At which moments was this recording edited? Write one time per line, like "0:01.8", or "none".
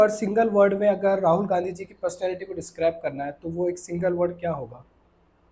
none